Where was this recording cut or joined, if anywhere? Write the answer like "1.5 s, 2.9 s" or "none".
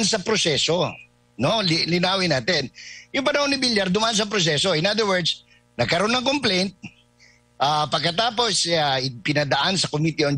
none

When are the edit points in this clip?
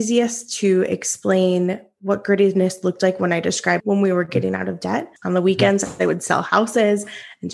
3.8 s, 5.1 s

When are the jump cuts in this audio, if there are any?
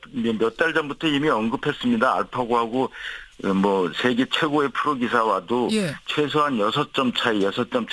none

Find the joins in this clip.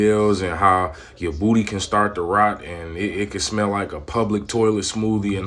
none

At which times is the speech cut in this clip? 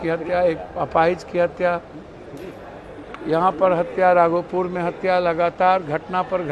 none

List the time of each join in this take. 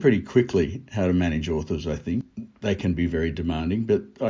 2.3 s

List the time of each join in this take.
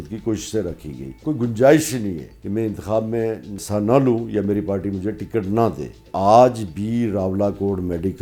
1.2 s, 2.3 s, 3.5 s, 6.1 s

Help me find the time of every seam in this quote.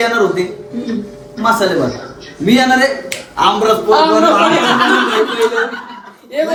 none

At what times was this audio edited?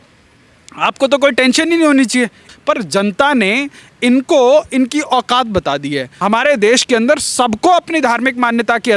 2.5 s, 6.1 s

